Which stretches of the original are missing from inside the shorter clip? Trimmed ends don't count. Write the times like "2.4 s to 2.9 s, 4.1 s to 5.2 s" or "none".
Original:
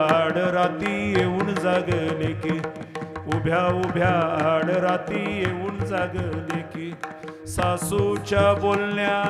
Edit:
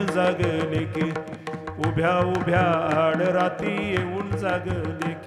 none